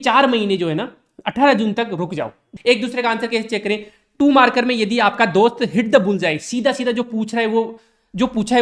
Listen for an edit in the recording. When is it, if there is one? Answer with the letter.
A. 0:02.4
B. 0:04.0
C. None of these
A